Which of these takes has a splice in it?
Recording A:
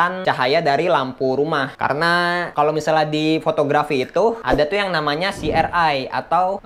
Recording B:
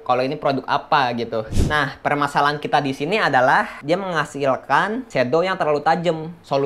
B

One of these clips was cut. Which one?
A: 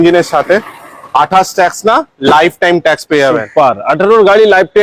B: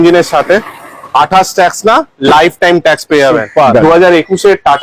B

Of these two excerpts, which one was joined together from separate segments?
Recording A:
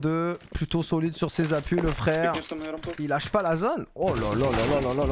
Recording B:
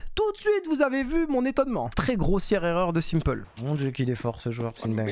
B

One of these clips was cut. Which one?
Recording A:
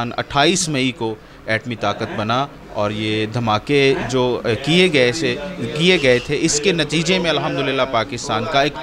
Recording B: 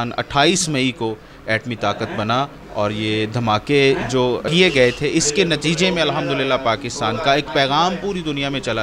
B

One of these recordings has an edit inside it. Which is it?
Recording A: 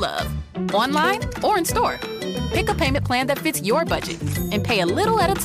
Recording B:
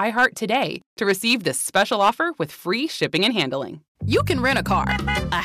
B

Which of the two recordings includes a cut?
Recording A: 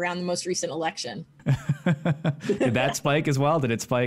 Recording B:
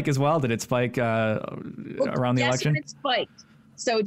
A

